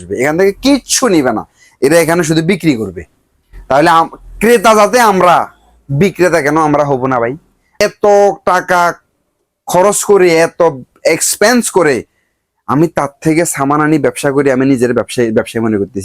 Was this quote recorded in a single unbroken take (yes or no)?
no